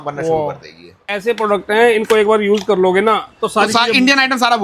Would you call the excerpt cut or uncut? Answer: cut